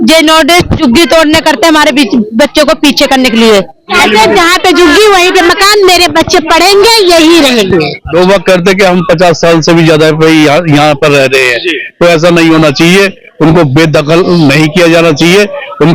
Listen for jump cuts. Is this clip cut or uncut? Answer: cut